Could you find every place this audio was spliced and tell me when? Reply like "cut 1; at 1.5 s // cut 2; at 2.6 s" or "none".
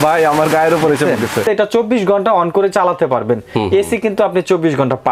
cut 1; at 1.4 s